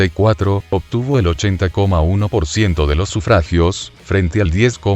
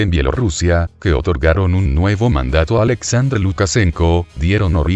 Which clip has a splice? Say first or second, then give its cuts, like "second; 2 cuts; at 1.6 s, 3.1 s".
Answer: first; 1 cut; at 3.9 s